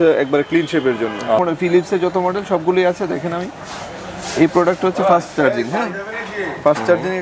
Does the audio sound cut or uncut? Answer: cut